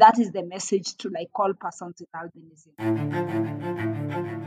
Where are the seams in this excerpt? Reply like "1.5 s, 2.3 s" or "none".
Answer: 2.7 s